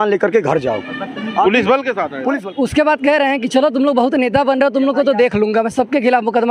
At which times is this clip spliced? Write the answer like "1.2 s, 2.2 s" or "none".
2.4 s